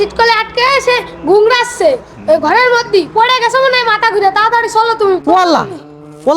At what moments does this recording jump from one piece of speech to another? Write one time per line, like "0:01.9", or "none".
0:05.2